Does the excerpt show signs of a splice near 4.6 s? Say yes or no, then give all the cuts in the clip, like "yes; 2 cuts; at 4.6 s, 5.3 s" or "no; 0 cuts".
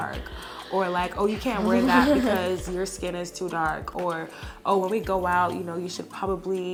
no; 0 cuts